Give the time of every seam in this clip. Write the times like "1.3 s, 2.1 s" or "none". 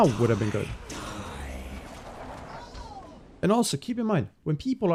none